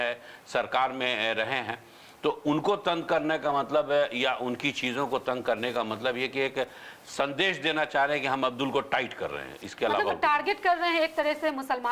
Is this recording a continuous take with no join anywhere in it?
yes; 0 cuts

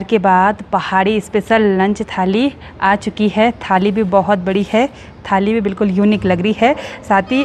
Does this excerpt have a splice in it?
no; 0 cuts

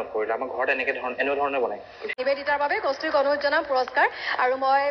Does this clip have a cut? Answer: yes; 1 cut; at 2.2 s

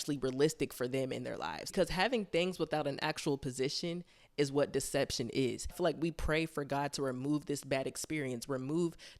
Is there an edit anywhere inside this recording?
yes; 2 cuts; at 1.6 s, 5.7 s

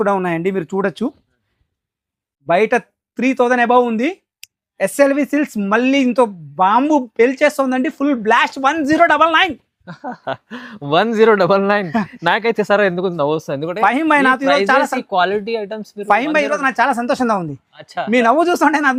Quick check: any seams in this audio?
no; 0 cuts

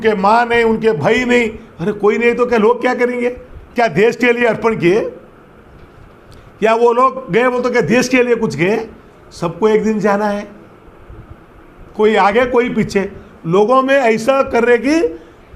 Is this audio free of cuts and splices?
yes; 0 cuts

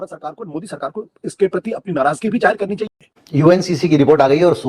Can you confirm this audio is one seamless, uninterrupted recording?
no; 1 cut; at 2.9 s

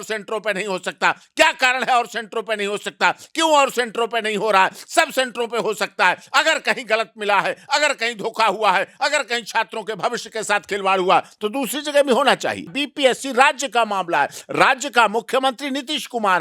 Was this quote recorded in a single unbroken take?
no; 1 cut; at 12.8 s

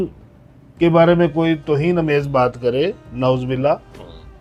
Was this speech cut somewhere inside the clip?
no; 0 cuts

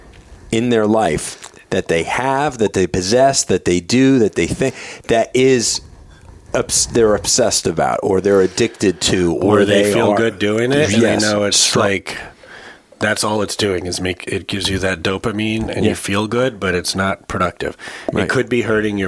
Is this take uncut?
yes; 0 cuts

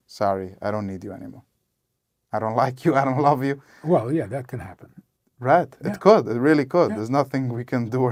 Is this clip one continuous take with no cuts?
yes; 0 cuts

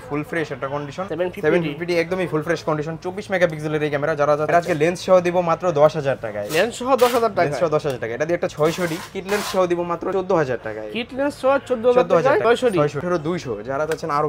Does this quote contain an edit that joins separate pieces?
yes; 5 cuts; at 1.1 s, 4.5 s, 8.5 s, 10.1 s, 12.8 s

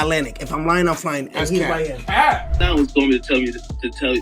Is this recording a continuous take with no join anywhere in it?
no; 1 cut; at 2.6 s

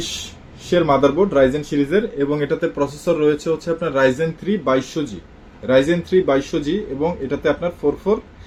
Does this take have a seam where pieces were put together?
no; 0 cuts

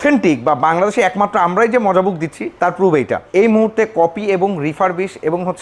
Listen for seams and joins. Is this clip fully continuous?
no; 2 cuts; at 2.4 s, 3.2 s

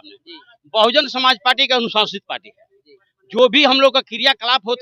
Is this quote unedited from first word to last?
yes; 0 cuts

